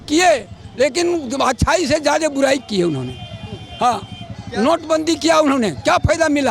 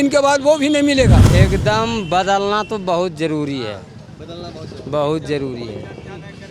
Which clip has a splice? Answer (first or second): second